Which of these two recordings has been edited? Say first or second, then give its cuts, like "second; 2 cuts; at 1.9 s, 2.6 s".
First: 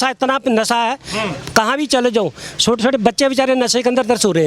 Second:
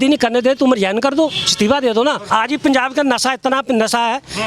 second; 1 cut; at 2.2 s